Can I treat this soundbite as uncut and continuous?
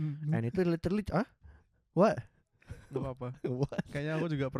yes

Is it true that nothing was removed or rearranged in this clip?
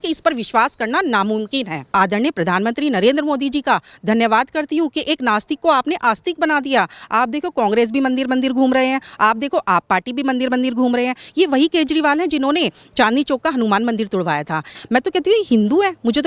no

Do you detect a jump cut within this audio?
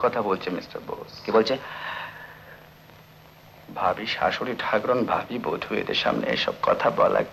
no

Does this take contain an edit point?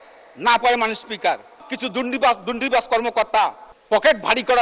yes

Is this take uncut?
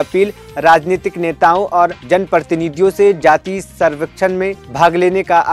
yes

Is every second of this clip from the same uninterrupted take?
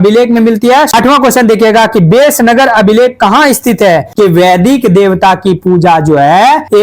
no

